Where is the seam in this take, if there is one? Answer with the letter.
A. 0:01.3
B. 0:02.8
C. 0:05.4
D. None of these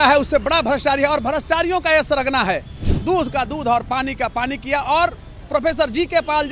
B